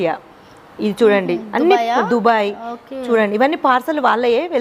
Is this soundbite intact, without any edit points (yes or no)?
yes